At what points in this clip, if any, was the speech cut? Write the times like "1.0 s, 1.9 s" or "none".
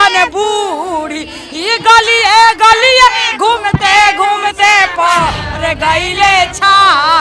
none